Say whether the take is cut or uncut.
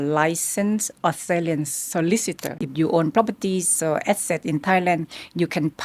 cut